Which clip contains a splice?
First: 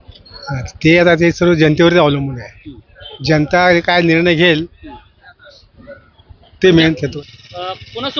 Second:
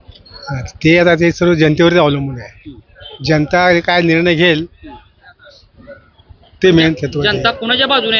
first; 1 cut; at 7.1 s

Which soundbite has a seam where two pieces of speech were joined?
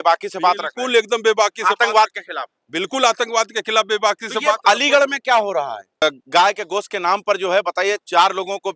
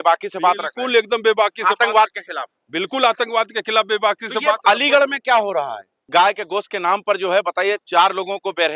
second; 1 cut; at 5.9 s

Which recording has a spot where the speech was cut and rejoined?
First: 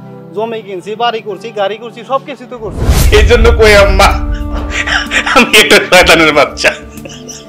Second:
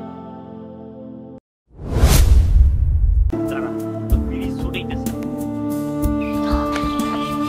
first; 1 cut; at 2.9 s

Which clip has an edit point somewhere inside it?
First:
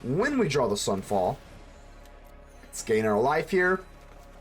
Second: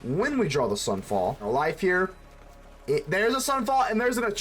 second; 1 cut; at 1.5 s

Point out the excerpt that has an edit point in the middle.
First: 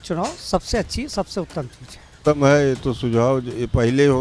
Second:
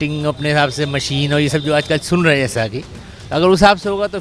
first; 1 cut; at 2.2 s

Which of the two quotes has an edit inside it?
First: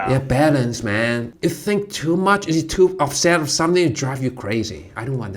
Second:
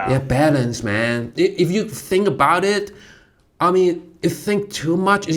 first; 1 cut; at 1.3 s

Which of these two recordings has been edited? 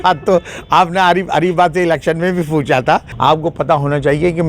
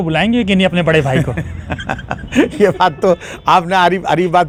first; 1 cut; at 3.1 s

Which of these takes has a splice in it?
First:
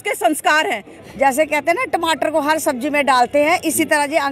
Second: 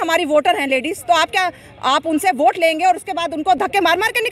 first; 1 cut; at 0.9 s

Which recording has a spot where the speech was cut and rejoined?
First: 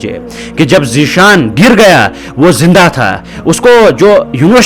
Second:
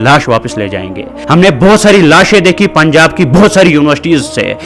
second; 1 cut; at 1.1 s

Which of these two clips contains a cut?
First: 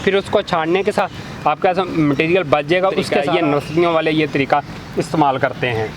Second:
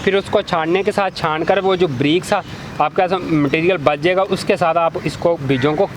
first; 2 cuts; at 1.0 s, 3.2 s

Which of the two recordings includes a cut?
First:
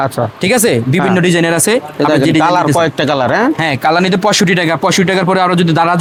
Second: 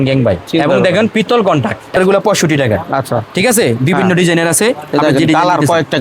second; 1 cut; at 2.0 s

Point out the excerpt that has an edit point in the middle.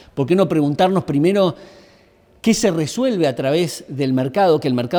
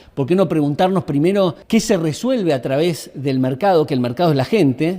second; 1 cut; at 1.6 s

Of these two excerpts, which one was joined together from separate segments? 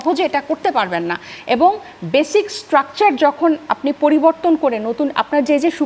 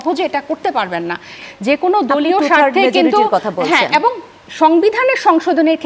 second; 1 cut; at 1.4 s

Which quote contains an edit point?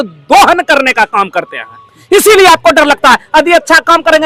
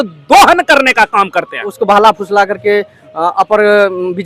second; 1 cut; at 1.7 s

